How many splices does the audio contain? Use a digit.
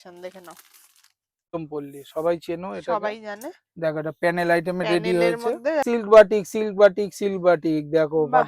2